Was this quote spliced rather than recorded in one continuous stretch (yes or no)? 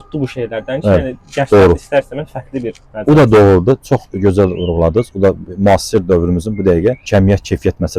no